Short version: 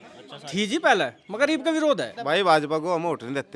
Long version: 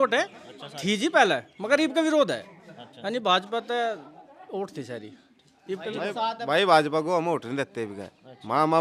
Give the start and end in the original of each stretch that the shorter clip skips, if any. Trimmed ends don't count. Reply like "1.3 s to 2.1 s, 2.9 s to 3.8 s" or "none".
2.5 s to 6.4 s